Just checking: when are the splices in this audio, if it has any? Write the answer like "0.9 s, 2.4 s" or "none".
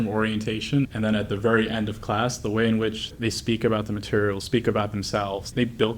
0.9 s